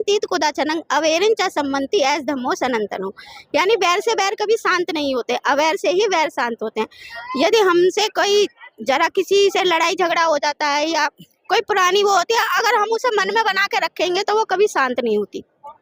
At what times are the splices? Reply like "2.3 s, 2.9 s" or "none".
none